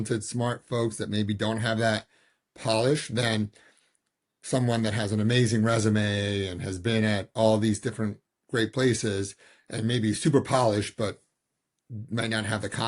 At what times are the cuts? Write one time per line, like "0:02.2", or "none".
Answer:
none